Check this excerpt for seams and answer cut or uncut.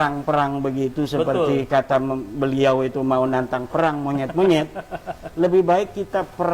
uncut